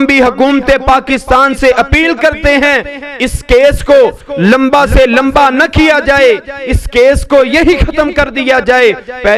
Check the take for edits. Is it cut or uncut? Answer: uncut